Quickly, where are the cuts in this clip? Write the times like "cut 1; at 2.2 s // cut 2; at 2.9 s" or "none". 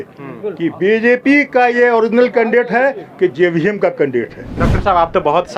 cut 1; at 4.5 s